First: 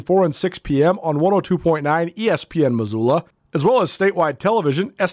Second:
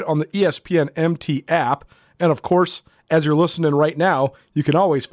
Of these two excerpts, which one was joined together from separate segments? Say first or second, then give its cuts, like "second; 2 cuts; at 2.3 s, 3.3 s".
first; 1 cut; at 3.4 s